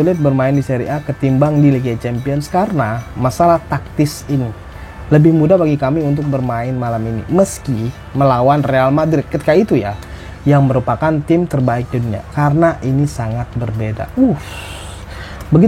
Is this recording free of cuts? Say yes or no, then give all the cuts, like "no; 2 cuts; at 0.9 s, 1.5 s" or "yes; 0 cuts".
yes; 0 cuts